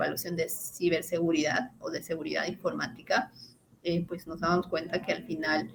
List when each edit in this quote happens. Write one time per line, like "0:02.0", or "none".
none